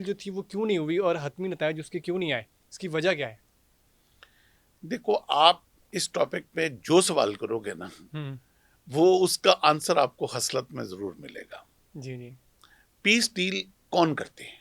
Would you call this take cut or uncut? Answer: uncut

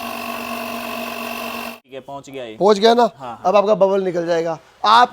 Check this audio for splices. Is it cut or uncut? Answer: cut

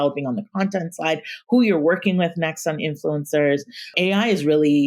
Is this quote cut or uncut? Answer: cut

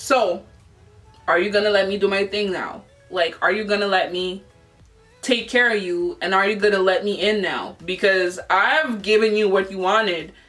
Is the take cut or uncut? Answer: uncut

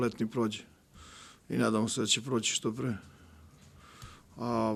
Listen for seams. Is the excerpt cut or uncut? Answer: uncut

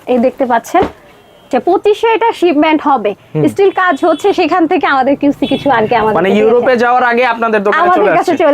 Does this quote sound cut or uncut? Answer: cut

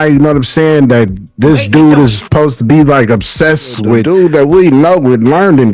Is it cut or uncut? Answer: cut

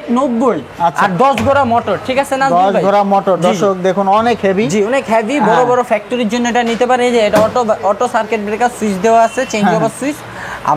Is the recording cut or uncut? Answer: uncut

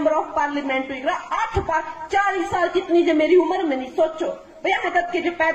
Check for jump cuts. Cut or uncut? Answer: uncut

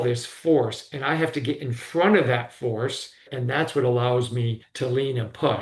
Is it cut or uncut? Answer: cut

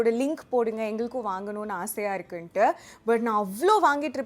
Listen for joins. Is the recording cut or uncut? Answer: uncut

